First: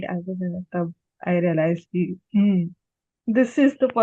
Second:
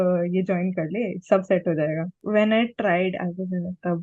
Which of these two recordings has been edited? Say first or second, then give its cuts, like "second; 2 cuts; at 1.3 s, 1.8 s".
second; 1 cut; at 2.2 s